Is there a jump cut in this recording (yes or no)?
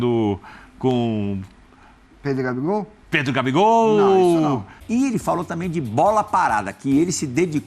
yes